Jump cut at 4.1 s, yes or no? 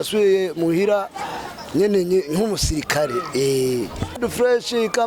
yes